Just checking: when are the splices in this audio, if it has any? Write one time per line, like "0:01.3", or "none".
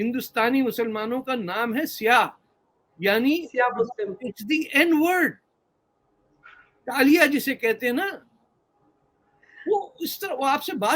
none